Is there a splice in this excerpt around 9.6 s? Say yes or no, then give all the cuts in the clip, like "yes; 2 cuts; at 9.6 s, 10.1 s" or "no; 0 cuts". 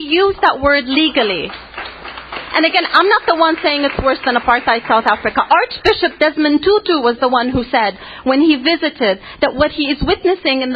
yes; 1 cut; at 9.6 s